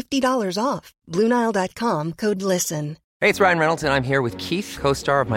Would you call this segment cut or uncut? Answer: cut